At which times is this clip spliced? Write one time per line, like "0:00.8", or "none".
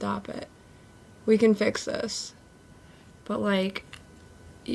none